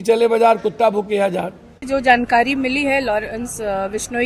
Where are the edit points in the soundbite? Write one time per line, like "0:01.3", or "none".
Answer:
0:01.7